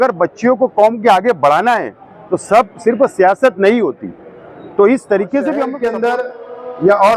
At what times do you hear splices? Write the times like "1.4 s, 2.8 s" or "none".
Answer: 5.7 s